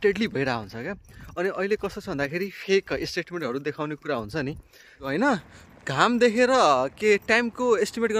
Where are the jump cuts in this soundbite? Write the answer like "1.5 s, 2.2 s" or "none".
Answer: 5.0 s